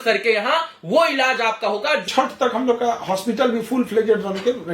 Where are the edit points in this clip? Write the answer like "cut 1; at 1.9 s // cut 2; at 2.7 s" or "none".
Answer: cut 1; at 2.1 s